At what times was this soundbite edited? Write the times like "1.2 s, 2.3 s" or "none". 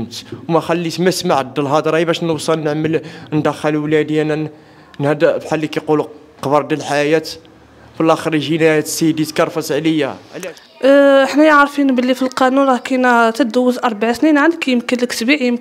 10.2 s